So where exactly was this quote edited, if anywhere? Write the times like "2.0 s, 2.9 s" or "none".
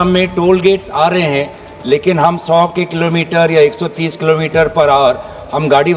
none